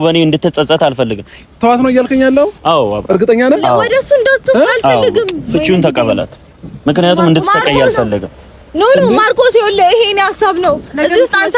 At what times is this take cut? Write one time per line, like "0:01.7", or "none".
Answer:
0:01.3